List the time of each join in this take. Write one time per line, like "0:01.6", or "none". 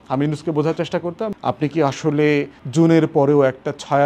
0:01.3
0:02.6